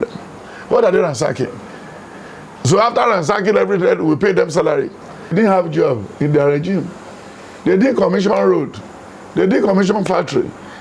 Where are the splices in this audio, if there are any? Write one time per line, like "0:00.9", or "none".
0:05.3